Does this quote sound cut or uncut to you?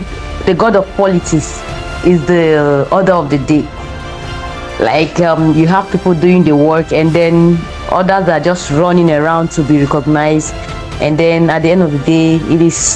uncut